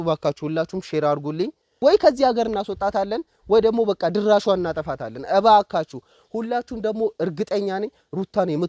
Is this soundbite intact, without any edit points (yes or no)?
no